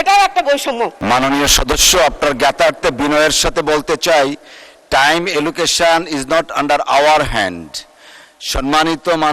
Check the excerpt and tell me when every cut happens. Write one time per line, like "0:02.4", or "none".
0:01.0